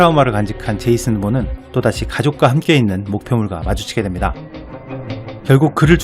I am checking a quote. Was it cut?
yes; 1 cut; at 0.9 s

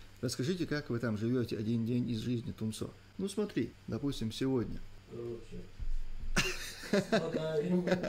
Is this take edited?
yes; 3 cuts; at 3.0 s, 3.8 s, 4.9 s

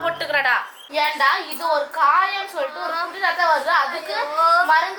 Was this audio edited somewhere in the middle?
no; 0 cuts

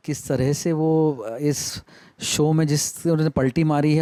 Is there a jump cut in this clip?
no; 0 cuts

